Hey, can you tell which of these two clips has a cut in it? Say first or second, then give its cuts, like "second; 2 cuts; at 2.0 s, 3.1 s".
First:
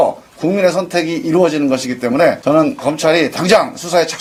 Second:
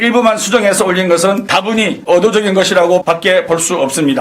second; 1 cut; at 3.0 s